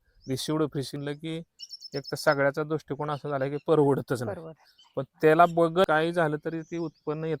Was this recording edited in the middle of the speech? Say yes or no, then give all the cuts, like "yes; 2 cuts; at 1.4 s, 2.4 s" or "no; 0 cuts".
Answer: yes; 2 cuts; at 1.0 s, 5.9 s